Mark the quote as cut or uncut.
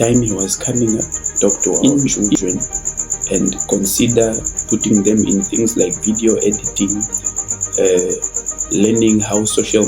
cut